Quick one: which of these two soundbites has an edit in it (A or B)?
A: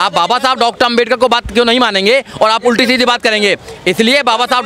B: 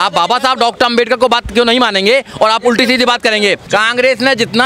B